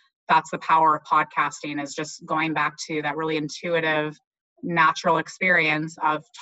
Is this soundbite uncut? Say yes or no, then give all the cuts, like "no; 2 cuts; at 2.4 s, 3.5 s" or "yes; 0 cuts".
yes; 0 cuts